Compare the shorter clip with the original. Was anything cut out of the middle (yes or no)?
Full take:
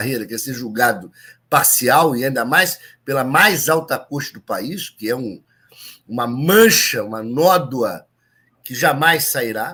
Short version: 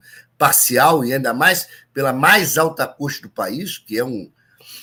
no